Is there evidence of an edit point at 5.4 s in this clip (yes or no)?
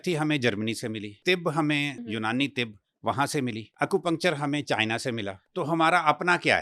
yes